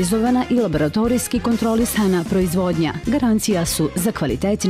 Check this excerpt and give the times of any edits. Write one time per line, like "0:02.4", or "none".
none